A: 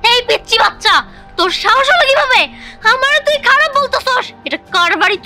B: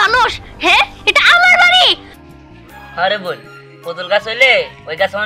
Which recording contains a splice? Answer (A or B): B